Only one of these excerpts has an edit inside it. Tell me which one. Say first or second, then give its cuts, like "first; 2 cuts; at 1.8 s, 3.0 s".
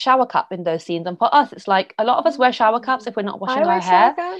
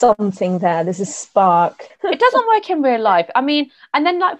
second; 1 cut; at 1.9 s